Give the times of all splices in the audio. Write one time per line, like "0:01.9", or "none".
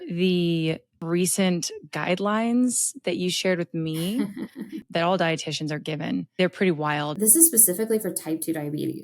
0:00.9
0:04.8
0:06.3
0:07.1